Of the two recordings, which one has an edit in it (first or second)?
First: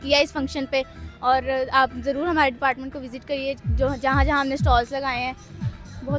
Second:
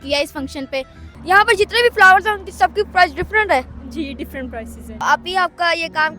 second